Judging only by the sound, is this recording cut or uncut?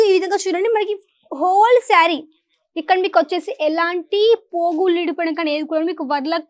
uncut